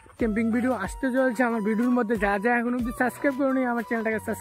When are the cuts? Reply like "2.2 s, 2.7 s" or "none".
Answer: none